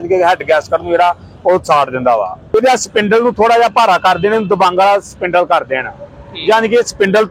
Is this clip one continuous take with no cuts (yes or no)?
no